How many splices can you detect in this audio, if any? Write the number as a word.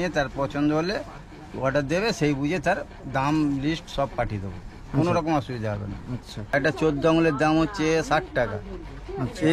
one